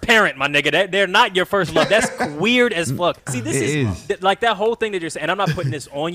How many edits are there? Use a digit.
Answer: 1